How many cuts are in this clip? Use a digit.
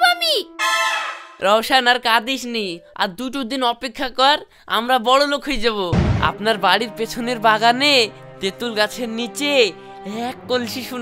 1